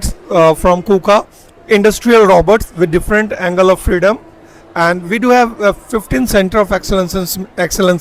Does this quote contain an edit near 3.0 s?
no; 0 cuts

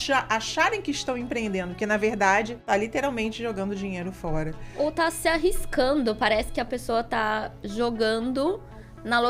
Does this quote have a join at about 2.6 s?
yes; 1 cut; at 2.6 s

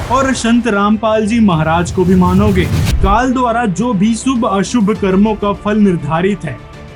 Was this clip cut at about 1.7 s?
no; 1 cut; at 2.9 s

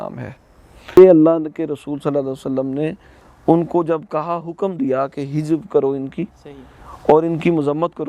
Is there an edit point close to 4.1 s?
no; 1 cut; at 0.9 s

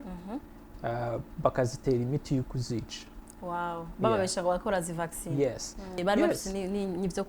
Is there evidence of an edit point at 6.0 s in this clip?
yes; 1 cut; at 6.0 s

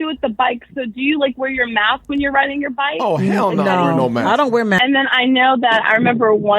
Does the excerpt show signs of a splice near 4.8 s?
yes; 1 cut; at 4.8 s

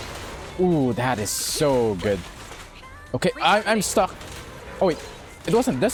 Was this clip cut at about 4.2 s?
no; 0 cuts

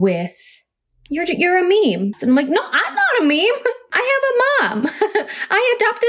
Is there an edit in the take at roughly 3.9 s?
yes; 2 cuts; at 2.2 s, 3.9 s

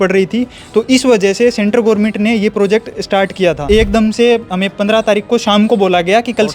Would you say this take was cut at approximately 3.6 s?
yes; 1 cut; at 3.6 s

